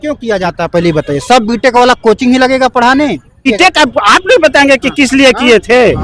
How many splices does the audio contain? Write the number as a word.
one